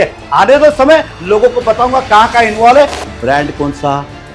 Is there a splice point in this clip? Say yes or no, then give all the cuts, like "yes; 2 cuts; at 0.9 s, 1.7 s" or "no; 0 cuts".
yes; 1 cut; at 3.0 s